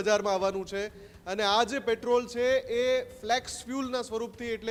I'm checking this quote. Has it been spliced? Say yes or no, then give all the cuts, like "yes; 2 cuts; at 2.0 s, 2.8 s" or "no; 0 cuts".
no; 0 cuts